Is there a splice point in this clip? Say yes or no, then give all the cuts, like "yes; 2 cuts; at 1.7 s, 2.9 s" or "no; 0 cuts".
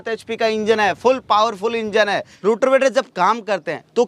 yes; 1 cut; at 2.3 s